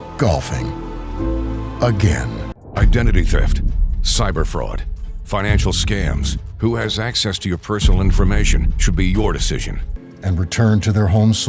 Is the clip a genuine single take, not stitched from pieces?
yes; 0 cuts

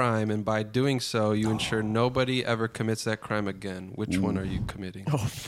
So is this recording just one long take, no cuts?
yes; 0 cuts

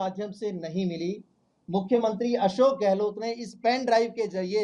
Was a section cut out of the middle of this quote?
no; 0 cuts

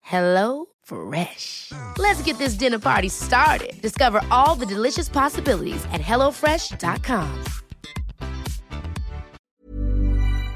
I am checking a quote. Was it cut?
yes; 1 cut; at 9.3 s

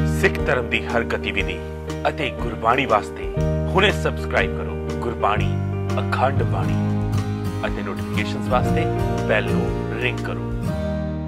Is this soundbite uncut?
yes; 0 cuts

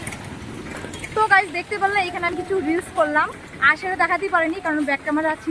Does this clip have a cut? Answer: no; 0 cuts

